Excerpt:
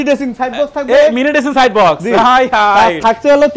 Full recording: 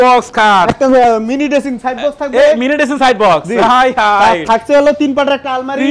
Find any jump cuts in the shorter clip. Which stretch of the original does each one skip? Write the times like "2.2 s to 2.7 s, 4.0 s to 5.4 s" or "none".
none